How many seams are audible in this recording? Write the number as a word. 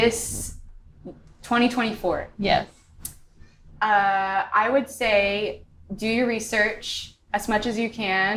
zero